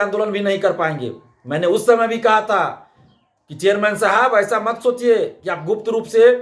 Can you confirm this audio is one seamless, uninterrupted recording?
yes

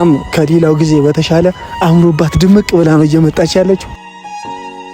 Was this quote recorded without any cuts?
no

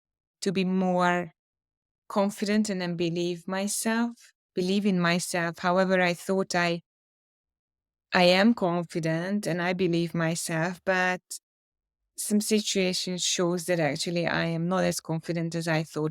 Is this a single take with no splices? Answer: yes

